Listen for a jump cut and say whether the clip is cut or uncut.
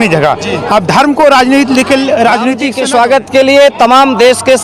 cut